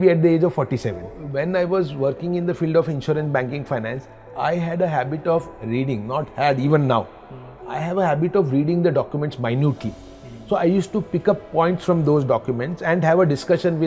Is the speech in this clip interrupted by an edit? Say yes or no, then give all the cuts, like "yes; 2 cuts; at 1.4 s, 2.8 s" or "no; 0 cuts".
yes; 1 cut; at 1.2 s